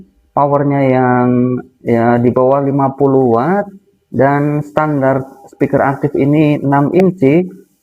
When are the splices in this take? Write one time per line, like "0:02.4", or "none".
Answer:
none

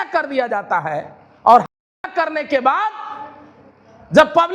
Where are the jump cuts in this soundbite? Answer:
none

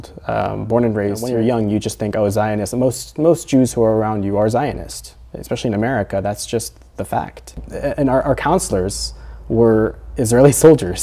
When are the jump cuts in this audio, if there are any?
0:01.2
0:07.7

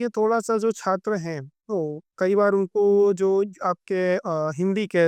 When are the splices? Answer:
none

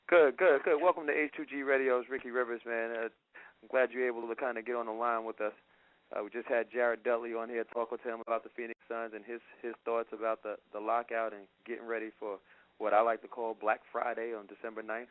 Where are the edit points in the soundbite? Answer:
0:12.6

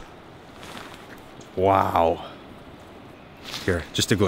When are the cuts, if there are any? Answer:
0:03.2

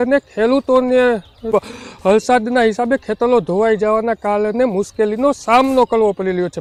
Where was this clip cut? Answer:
none

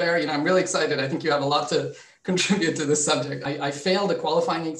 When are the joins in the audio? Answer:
0:03.4

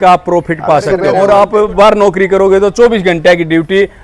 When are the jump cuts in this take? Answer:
0:01.1

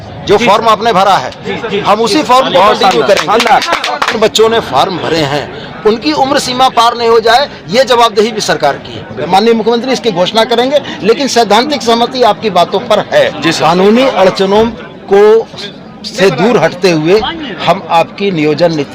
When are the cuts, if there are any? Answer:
0:04.2
0:09.3
0:13.6

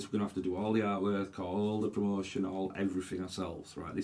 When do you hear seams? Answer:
none

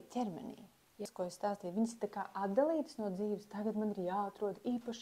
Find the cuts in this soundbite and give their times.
0:01.0

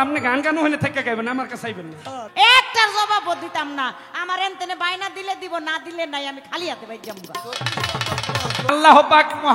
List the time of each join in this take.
0:02.1
0:08.7

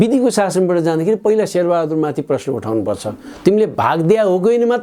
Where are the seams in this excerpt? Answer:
none

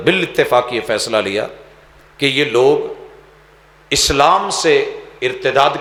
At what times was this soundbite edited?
none

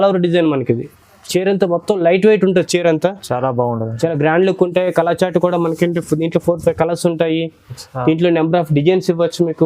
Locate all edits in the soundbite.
none

